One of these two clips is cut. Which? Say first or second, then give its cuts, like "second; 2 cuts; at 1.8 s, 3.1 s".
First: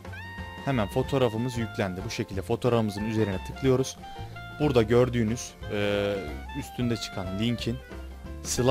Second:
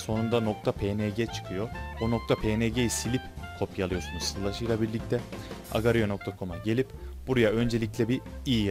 second; 1 cut; at 4.8 s